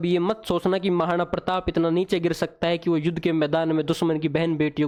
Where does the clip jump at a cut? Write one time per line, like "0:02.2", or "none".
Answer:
none